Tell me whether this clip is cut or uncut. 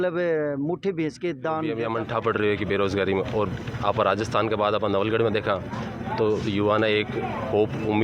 cut